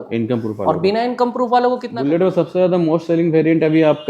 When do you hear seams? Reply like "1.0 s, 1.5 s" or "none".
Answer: 1.9 s